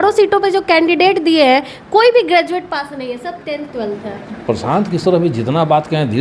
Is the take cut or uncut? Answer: uncut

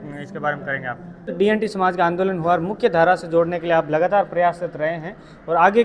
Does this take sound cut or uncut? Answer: cut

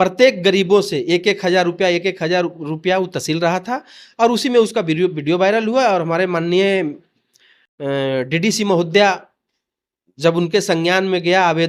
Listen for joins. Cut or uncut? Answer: uncut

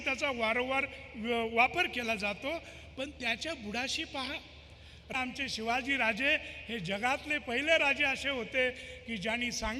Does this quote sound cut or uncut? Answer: cut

